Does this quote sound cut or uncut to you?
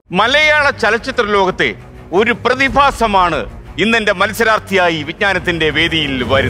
uncut